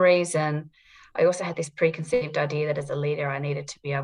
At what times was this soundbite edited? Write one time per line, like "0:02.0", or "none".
none

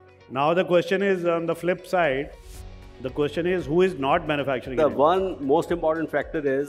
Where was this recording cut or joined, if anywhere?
0:04.7

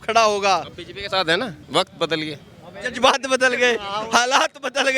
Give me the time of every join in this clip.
0:01.6

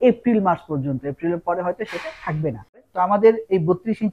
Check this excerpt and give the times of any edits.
0:02.7

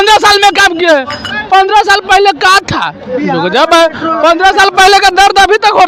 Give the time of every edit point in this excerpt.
none

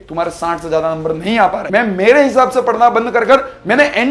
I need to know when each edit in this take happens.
0:01.6

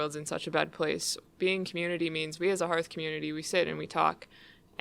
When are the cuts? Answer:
0:01.2

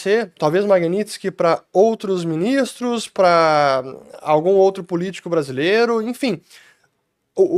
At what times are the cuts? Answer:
none

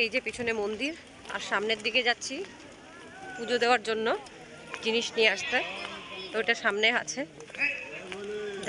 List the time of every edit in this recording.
none

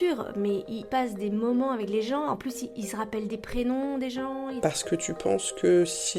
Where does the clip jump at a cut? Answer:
0:04.6

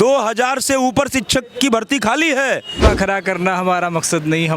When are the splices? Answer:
0:02.8

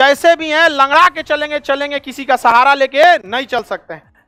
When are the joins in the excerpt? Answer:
none

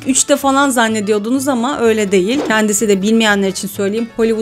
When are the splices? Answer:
0:02.4

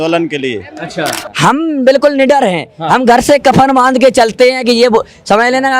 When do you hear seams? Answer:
0:01.2

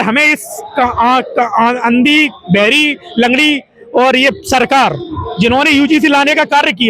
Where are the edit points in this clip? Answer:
none

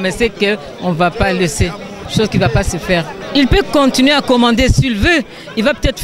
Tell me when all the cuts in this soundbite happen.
0:03.2

